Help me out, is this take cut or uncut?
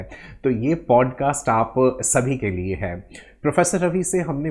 uncut